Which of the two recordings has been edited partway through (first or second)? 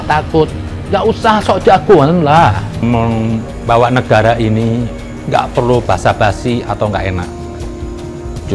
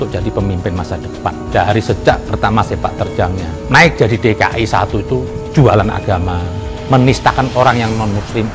first